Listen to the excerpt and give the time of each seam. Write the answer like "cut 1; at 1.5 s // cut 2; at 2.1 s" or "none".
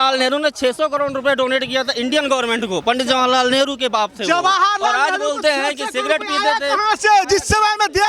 none